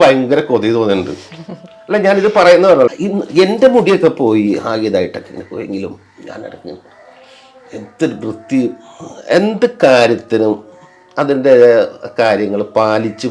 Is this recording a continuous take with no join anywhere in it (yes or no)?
no